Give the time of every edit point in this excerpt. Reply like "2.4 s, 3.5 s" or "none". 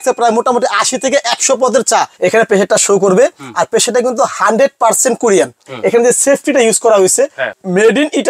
2.1 s, 5.7 s, 7.5 s